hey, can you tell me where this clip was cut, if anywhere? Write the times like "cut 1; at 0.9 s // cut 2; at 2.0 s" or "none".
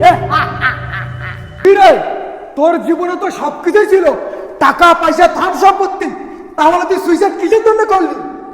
cut 1; at 1.7 s